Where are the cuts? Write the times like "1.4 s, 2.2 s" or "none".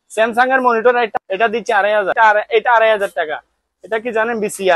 1.1 s, 2.1 s